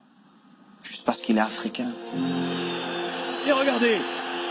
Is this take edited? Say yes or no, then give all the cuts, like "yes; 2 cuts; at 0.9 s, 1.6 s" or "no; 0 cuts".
no; 0 cuts